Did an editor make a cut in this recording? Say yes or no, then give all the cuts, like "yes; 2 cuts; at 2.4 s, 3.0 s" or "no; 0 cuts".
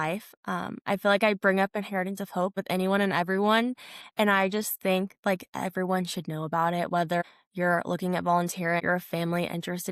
yes; 3 cuts; at 2.5 s, 7.2 s, 8.8 s